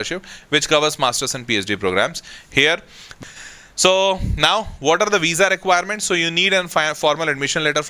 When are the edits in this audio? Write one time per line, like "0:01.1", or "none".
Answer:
0:03.0